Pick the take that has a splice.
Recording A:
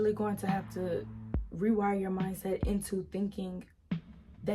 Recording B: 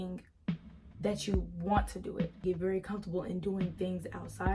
B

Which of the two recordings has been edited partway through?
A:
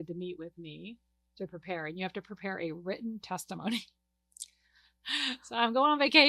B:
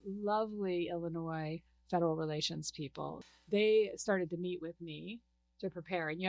B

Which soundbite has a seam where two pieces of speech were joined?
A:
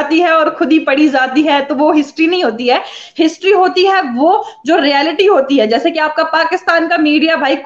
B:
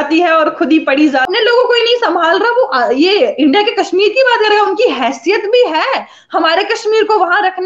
B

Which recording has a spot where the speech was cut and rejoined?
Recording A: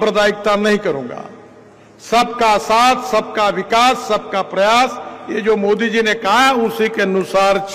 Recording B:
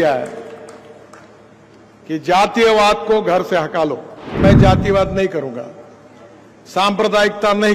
B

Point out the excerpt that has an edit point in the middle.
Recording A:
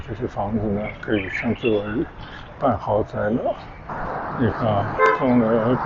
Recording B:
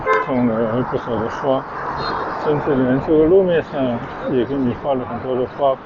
A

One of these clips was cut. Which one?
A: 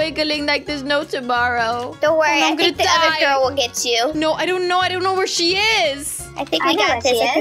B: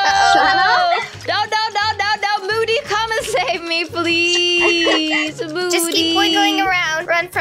A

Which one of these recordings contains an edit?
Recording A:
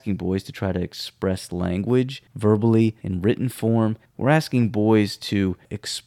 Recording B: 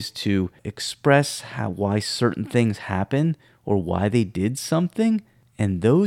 A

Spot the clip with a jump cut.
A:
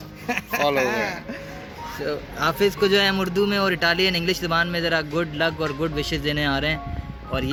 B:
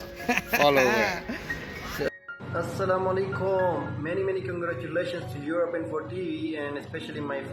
B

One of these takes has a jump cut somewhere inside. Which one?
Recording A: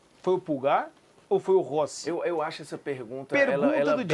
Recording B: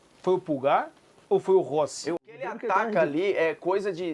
B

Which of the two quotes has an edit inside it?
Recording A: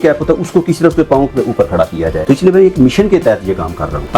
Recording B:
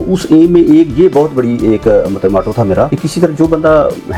A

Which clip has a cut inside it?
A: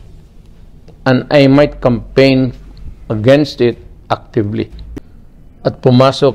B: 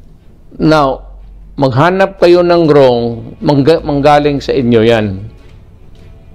A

